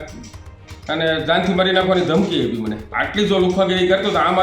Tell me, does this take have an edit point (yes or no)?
yes